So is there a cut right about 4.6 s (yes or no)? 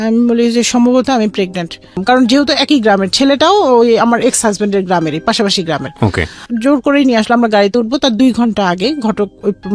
no